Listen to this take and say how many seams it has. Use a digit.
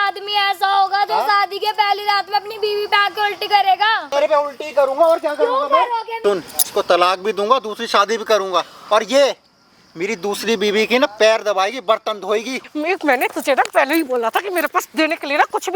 3